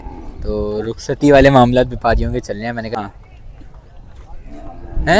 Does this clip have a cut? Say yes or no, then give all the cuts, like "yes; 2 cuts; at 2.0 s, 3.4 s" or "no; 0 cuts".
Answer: yes; 1 cut; at 3.0 s